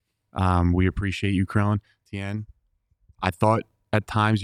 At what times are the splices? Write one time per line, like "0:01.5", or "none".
none